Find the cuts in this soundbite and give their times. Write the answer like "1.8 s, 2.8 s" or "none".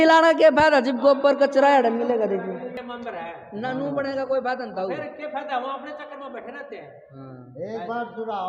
2.8 s